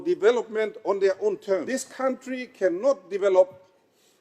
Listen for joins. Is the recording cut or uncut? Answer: cut